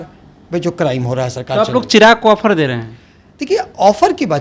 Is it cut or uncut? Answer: uncut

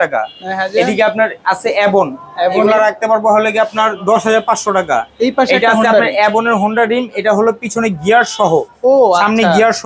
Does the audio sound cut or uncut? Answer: uncut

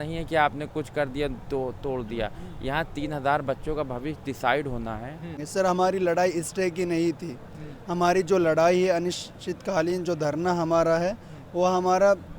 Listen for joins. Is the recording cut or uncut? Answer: cut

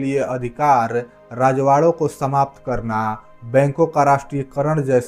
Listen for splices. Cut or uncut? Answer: uncut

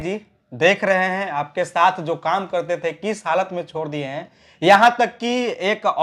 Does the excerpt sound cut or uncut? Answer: uncut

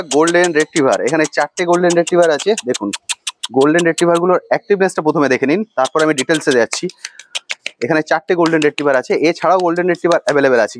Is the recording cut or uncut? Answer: uncut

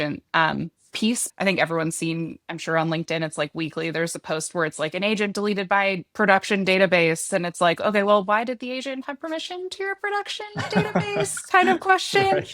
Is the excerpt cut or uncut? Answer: cut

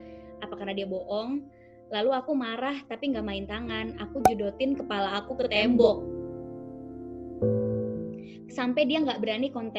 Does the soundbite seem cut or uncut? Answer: cut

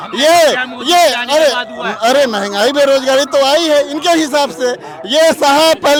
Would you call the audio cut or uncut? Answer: uncut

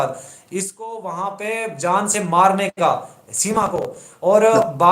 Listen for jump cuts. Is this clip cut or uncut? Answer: uncut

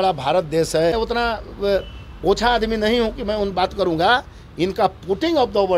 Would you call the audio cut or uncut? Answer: cut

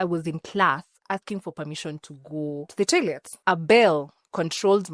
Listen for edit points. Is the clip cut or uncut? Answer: cut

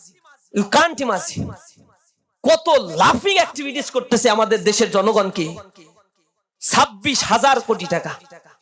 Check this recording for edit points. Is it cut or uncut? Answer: uncut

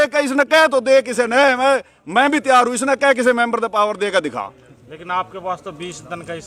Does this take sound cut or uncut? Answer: uncut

